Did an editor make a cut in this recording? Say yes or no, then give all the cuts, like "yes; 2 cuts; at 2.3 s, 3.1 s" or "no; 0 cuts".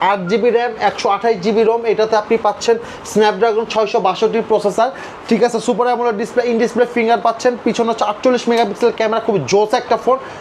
no; 0 cuts